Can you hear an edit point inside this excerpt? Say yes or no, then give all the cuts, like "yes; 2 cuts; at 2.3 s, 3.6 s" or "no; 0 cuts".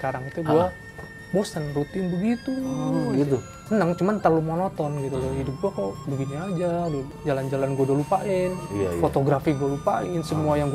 yes; 2 cuts; at 3.5 s, 7.1 s